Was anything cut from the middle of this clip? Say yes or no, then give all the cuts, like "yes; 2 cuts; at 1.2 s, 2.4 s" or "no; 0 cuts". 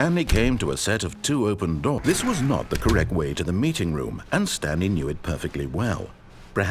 yes; 1 cut; at 2.0 s